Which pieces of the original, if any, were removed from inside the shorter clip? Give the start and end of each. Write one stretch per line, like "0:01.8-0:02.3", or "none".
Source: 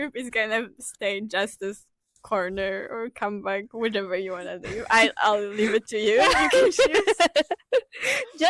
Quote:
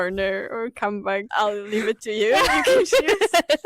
0:03.7-0:05.1